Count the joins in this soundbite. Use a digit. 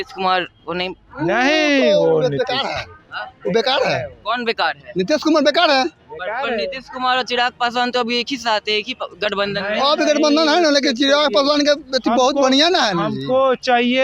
0